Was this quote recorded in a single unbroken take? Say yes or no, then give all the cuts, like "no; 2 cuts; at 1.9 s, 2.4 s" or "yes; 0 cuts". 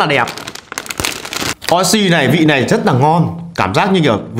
no; 1 cut; at 1.5 s